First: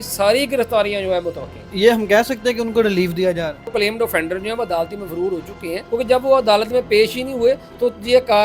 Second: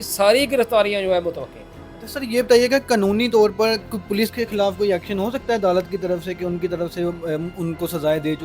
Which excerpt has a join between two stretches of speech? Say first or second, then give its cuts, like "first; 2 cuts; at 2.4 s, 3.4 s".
first; 3 cuts; at 1.7 s, 3.7 s, 5.8 s